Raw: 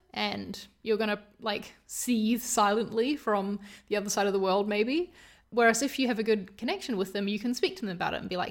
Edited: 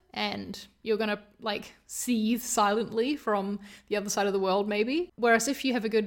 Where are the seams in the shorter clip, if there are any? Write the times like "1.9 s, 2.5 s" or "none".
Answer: 5.1 s

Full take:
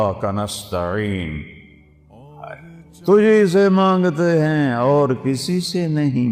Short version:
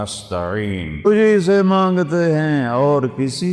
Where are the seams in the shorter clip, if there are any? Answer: 1.1 s

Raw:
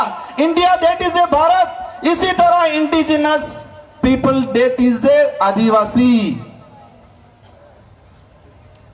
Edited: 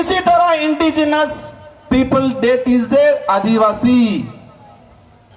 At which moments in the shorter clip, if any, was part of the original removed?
none

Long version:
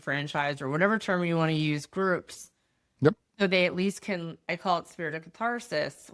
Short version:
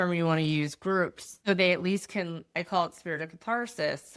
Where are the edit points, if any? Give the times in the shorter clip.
1.3 s

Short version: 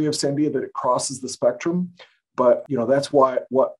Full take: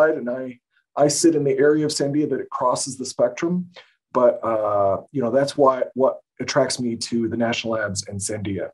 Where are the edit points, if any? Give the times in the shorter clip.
2.6 s

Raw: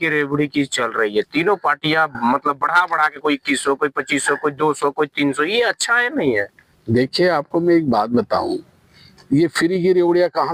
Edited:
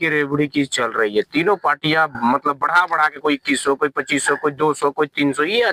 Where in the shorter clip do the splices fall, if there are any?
none

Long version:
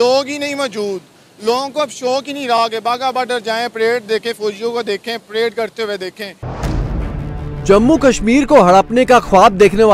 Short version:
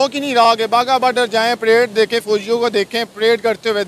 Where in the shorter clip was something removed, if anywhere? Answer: none

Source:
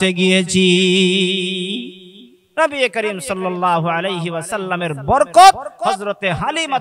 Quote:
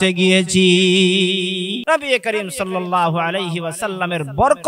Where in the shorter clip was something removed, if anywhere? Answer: 1.8 s

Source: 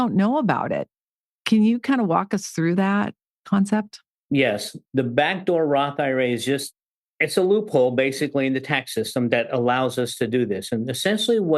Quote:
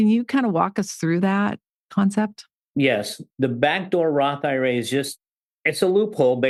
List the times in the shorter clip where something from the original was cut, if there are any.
none

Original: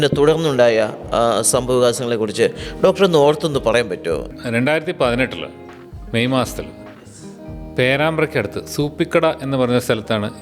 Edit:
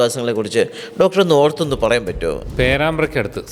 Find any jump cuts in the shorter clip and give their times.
2.5 s

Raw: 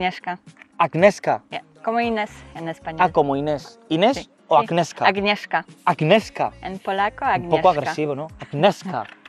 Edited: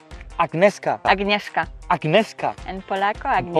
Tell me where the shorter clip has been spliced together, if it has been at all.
1.0 s

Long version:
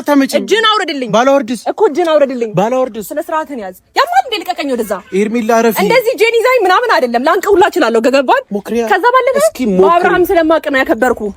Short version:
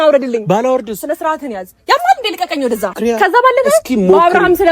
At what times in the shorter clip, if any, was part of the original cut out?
2.9 s

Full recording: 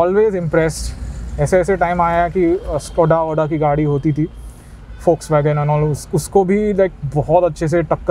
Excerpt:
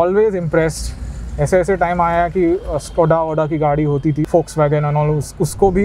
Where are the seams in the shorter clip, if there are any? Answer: 4.3 s

